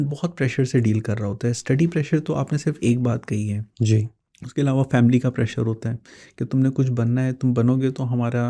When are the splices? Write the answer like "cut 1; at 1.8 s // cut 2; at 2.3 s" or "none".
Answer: none